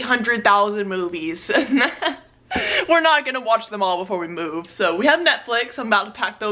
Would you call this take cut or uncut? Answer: uncut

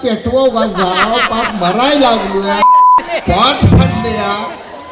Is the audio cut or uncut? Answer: uncut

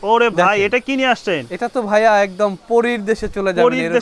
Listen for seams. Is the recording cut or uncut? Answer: uncut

